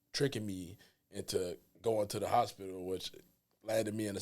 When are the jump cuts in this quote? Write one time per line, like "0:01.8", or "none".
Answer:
none

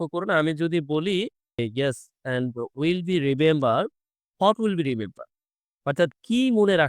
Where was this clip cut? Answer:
0:01.6

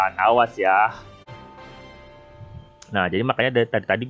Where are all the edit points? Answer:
0:01.4

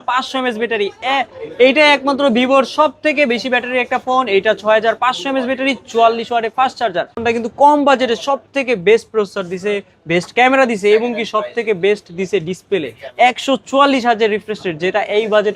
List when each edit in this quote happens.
0:07.2

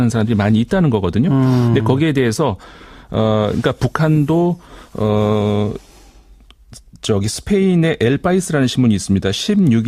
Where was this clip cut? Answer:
0:05.4

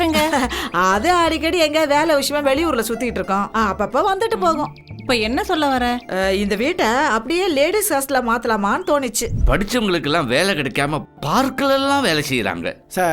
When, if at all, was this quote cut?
0:09.3

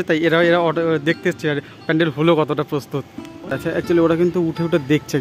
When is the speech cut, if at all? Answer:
0:03.6

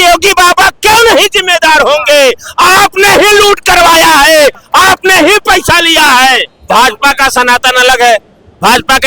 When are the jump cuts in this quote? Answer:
0:06.5

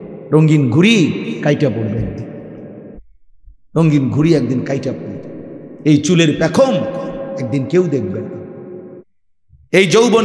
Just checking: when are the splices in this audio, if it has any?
0:03.0
0:09.0

